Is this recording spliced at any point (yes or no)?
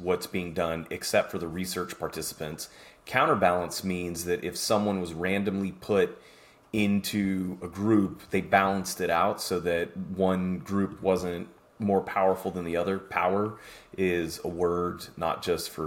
no